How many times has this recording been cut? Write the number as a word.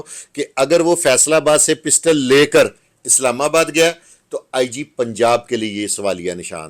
zero